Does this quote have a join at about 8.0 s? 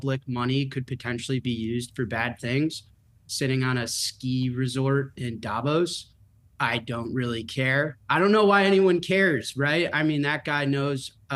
yes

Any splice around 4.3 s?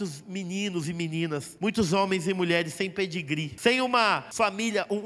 yes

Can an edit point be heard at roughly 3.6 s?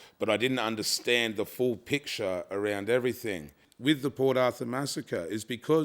yes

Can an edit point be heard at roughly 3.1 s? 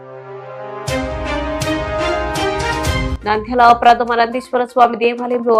yes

